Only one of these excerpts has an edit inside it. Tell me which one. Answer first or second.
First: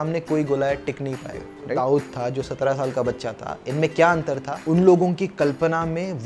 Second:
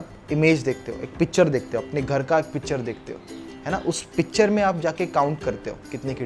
first